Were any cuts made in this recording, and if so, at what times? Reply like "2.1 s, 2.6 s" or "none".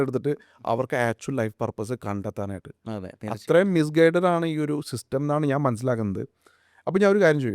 none